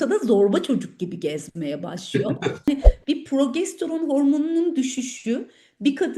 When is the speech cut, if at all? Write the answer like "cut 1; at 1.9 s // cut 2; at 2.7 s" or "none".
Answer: cut 1; at 2.7 s